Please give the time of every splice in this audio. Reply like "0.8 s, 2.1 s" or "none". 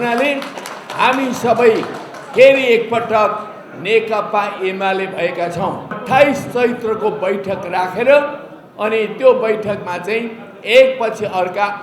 6.0 s